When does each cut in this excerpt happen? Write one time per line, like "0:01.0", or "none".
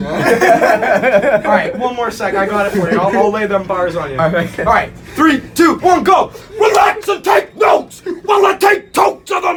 none